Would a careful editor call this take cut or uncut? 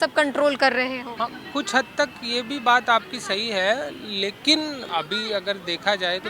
cut